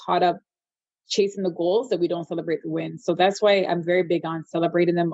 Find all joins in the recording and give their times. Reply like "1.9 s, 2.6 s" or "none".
none